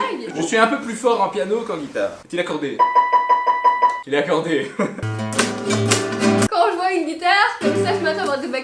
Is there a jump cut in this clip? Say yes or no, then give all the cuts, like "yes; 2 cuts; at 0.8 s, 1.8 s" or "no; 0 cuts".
no; 0 cuts